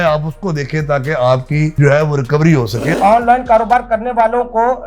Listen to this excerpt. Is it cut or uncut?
cut